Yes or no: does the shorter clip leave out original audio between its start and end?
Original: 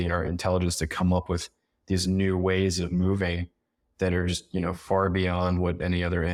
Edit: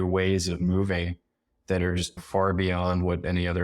yes